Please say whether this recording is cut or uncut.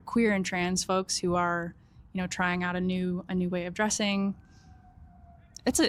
uncut